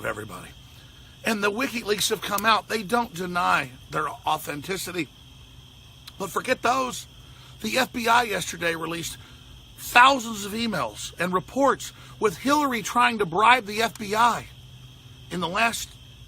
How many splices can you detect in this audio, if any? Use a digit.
1